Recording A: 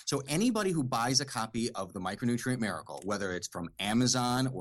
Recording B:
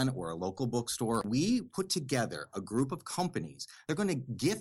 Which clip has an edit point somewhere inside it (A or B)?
B